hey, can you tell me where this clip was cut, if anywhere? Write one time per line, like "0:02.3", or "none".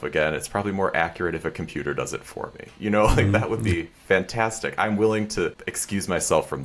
0:05.7